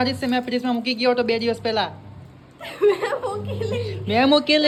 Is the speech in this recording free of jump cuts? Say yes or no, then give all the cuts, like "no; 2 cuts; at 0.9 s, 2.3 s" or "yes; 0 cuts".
yes; 0 cuts